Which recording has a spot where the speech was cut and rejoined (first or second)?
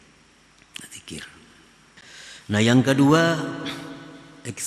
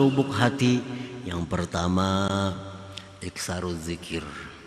first